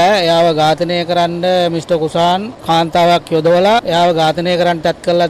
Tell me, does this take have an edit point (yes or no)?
no